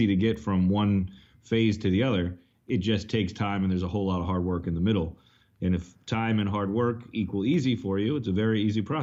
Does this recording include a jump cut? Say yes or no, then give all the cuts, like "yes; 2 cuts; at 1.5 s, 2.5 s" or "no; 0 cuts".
no; 0 cuts